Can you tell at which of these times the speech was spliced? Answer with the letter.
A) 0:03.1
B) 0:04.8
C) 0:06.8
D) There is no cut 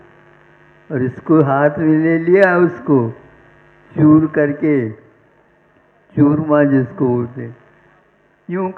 C